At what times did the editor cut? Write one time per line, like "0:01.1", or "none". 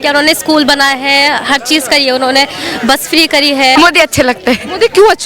0:03.7